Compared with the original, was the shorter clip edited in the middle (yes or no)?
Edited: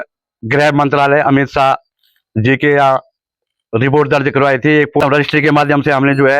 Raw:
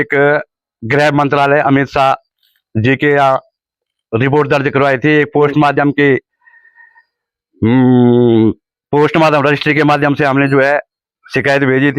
yes